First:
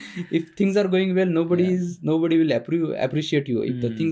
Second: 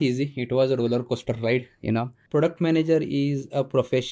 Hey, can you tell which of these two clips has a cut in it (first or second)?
second